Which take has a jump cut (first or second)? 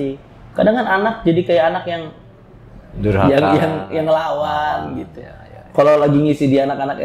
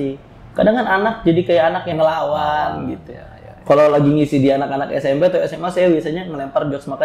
second